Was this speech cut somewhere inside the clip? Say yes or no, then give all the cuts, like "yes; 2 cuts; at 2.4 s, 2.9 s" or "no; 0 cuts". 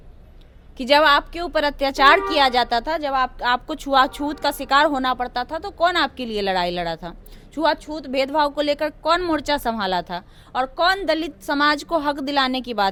no; 0 cuts